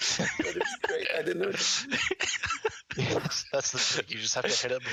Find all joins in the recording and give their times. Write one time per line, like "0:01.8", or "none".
none